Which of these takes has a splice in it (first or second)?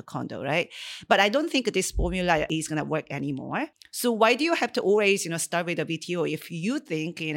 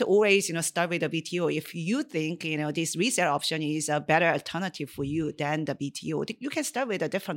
first